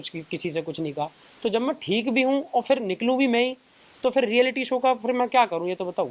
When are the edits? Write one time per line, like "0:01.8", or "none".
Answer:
none